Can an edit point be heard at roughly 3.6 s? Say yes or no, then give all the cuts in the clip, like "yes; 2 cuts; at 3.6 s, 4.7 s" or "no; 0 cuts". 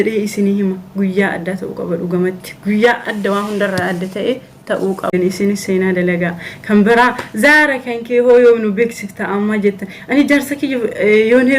no; 1 cut; at 5.1 s